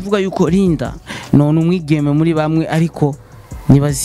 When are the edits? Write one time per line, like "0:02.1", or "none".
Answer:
none